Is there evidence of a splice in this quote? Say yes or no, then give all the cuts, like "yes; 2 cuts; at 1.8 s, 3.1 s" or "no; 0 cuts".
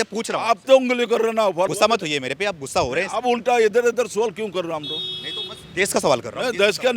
yes; 1 cut; at 1.7 s